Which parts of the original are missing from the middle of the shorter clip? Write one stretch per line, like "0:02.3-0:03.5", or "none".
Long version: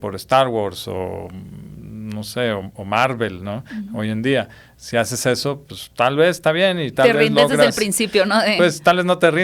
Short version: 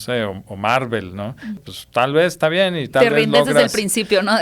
0:03.9-0:05.6